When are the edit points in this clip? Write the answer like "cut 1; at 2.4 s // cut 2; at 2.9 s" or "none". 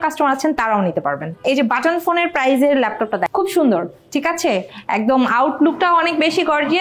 cut 1; at 1.4 s // cut 2; at 3.3 s